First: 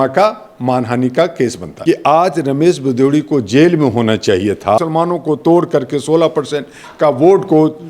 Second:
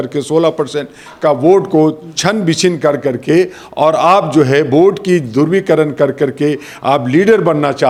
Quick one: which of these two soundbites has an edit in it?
first; 2 cuts; at 1.7 s, 4.8 s

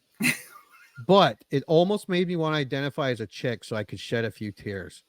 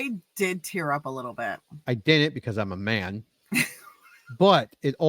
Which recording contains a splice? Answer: second; 1 cut; at 1.8 s

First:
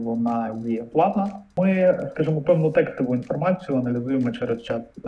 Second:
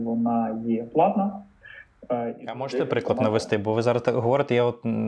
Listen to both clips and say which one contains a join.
first; 1 cut; at 1.5 s

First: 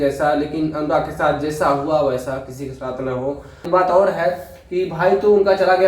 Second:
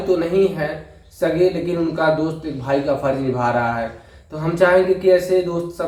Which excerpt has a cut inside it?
first; 1 cut; at 3.7 s

